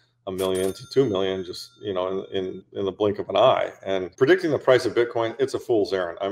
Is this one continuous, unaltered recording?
no; 1 cut; at 4.1 s

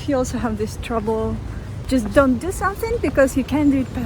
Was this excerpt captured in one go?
no; 1 cut; at 1.8 s

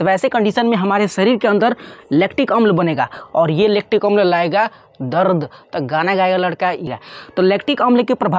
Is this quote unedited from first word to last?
no; 1 cut; at 6.9 s

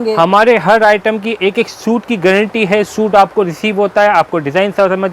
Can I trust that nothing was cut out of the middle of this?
yes; 0 cuts

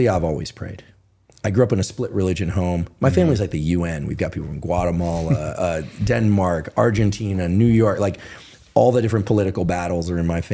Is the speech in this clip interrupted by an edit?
no; 0 cuts

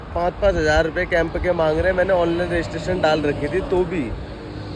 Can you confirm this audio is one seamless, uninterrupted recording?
yes; 0 cuts

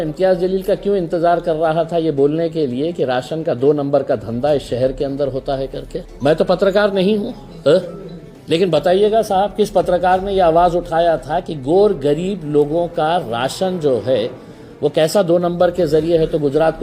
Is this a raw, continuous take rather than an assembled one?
no; 1 cut; at 6.0 s

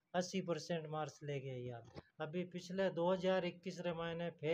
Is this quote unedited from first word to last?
no; 1 cut; at 2.0 s

